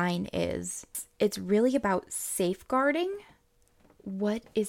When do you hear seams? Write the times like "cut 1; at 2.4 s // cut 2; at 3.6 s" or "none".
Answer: cut 1; at 1.0 s